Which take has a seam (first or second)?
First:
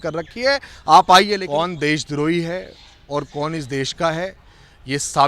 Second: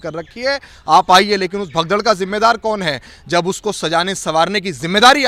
first